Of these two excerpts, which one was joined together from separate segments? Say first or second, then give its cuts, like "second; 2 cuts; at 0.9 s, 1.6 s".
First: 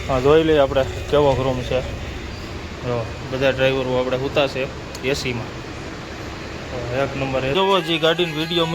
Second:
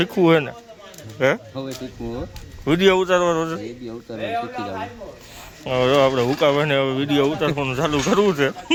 first; 1 cut; at 7.6 s